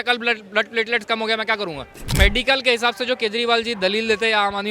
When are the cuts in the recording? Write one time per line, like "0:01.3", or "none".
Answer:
0:02.0